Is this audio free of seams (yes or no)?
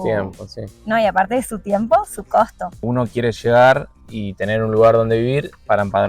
no